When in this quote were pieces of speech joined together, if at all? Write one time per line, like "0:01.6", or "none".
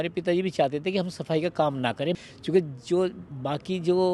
none